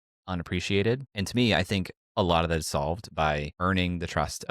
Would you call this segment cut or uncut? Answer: cut